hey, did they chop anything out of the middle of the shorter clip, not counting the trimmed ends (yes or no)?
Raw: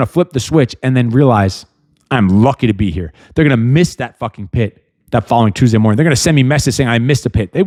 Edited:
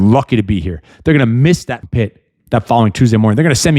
yes